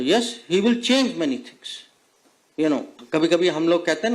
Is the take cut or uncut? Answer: cut